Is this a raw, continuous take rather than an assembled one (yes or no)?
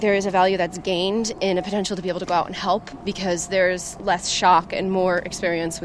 yes